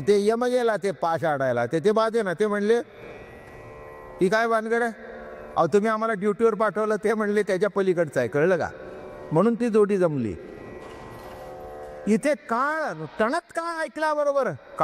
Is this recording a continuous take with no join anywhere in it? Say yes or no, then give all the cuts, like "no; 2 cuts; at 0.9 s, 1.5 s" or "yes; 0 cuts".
yes; 0 cuts